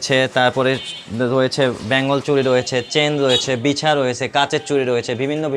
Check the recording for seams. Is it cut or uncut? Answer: uncut